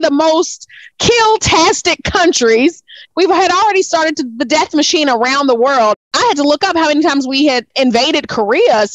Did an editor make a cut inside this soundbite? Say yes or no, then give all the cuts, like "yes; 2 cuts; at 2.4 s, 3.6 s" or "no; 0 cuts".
yes; 3 cuts; at 3.0 s, 6.0 s, 7.7 s